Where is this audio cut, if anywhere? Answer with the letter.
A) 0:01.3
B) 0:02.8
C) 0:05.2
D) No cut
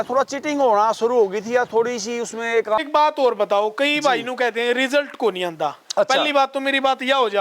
B